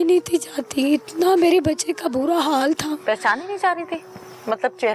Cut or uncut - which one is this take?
uncut